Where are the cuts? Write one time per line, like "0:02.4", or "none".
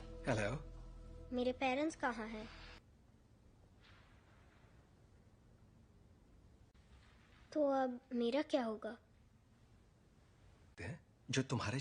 0:02.8